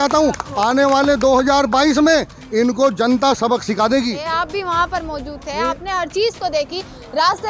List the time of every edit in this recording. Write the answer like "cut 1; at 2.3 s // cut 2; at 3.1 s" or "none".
cut 1; at 4.2 s